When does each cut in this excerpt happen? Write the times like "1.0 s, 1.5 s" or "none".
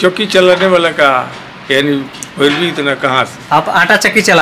none